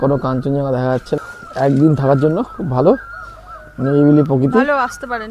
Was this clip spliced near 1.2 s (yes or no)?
yes